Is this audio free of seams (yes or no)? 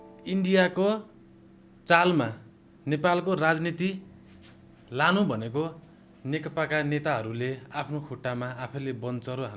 yes